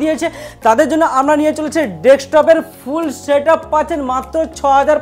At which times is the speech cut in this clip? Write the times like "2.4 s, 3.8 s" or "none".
none